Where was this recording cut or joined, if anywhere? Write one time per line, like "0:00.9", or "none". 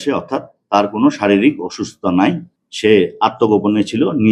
none